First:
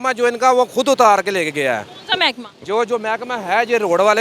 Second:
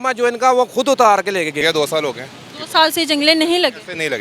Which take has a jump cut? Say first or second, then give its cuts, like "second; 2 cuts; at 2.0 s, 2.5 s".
second; 1 cut; at 1.6 s